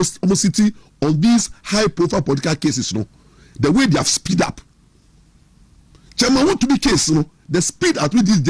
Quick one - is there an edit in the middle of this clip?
no; 0 cuts

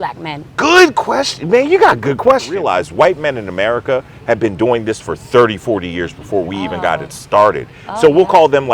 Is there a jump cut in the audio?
yes; 1 cut; at 2.5 s

